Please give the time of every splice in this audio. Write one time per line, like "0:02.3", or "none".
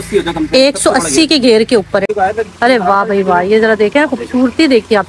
0:02.1

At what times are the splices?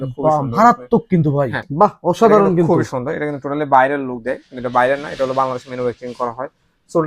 0:01.6

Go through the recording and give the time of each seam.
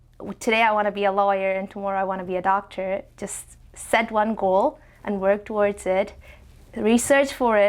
none

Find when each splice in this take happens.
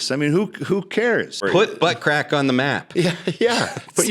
0:01.4

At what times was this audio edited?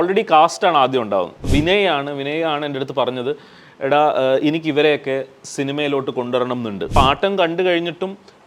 0:01.4
0:07.0

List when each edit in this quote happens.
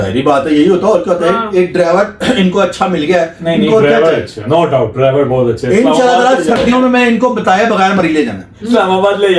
none

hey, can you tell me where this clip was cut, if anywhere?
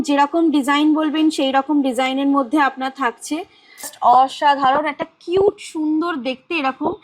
0:03.9

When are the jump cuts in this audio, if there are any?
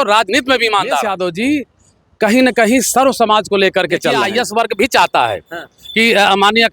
0:01.1
0:04.3

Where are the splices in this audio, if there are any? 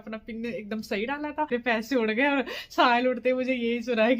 0:01.5

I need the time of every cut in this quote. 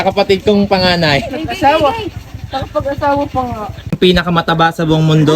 0:03.8

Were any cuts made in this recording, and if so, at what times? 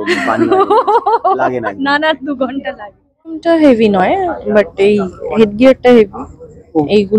0:03.4

